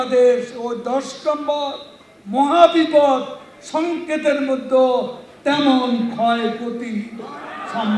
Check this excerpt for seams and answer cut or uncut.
uncut